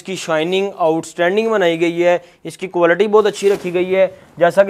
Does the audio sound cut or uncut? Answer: uncut